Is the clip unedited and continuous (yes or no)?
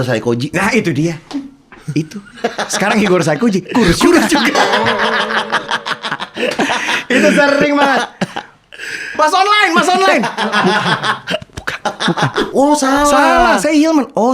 no